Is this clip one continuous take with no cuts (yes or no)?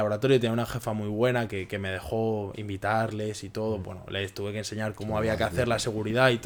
yes